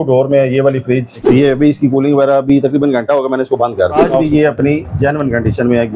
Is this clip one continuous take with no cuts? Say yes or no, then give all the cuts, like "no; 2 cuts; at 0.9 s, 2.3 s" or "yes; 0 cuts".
no; 2 cuts; at 1.2 s, 3.9 s